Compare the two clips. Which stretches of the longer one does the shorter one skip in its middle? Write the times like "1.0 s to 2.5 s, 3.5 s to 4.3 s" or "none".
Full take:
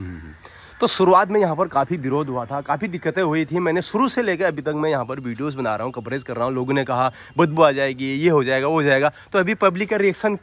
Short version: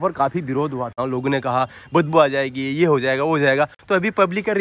2.5 s to 6.4 s